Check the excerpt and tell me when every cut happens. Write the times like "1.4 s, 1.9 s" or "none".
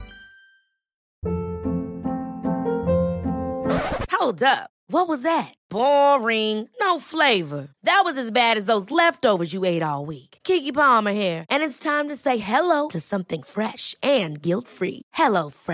1.0 s